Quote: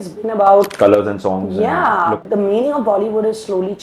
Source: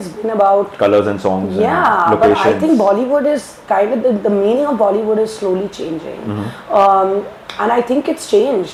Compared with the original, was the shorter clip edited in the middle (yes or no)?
yes